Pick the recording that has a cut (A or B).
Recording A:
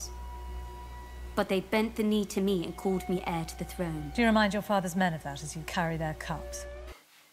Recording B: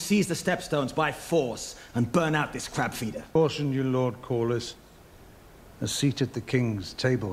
B